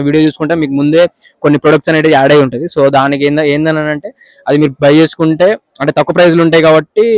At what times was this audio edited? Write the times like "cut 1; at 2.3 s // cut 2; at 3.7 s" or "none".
none